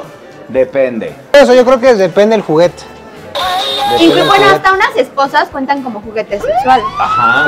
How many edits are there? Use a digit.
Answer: 1